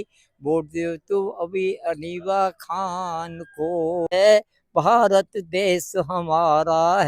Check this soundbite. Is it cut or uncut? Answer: cut